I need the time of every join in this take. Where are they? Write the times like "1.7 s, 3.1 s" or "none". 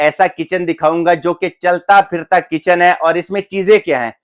none